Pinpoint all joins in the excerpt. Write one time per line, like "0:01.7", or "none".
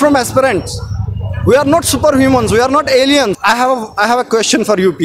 0:03.4